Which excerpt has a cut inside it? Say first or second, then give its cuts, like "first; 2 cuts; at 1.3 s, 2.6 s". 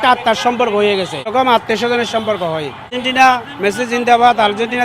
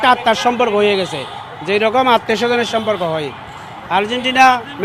first; 2 cuts; at 1.3 s, 2.9 s